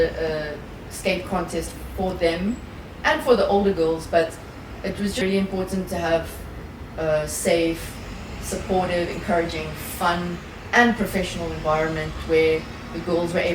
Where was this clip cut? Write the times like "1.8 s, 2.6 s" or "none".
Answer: 5.2 s